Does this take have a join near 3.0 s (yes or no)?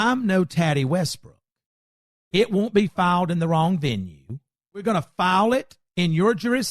no